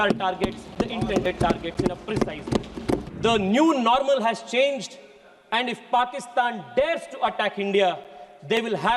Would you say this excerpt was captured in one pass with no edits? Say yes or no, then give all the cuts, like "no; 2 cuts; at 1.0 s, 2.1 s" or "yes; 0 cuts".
no; 1 cut; at 3.1 s